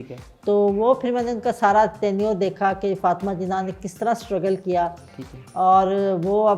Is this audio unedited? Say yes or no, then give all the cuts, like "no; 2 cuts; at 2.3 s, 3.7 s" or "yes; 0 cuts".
yes; 0 cuts